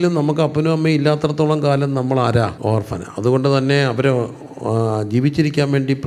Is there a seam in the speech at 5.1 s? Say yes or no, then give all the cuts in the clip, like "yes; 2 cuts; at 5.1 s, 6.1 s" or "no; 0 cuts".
no; 1 cut; at 2.6 s